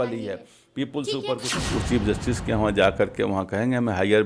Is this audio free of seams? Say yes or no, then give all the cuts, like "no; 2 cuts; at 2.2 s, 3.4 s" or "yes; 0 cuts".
no; 1 cut; at 1.5 s